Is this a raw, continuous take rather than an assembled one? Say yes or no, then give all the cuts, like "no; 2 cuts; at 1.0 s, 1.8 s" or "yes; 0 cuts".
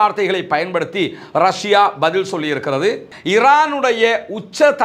no; 1 cut; at 3.1 s